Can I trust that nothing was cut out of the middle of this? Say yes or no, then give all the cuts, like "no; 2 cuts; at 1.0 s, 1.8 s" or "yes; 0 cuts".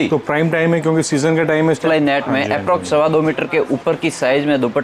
no; 1 cut; at 1.8 s